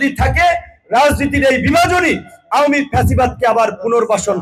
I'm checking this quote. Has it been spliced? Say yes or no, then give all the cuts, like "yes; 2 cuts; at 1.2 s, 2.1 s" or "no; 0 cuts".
no; 0 cuts